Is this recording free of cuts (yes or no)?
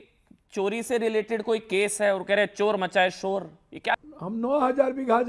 no